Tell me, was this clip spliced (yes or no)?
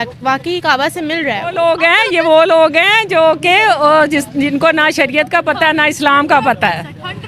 yes